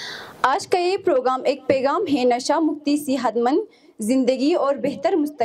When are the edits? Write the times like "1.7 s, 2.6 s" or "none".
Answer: none